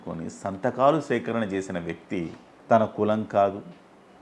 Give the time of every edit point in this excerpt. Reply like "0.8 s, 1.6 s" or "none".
2.5 s